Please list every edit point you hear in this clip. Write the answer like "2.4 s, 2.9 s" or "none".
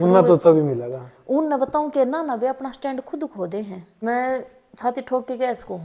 4.0 s